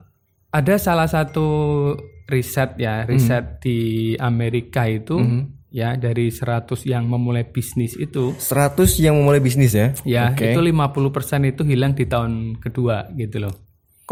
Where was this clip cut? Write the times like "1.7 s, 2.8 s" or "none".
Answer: none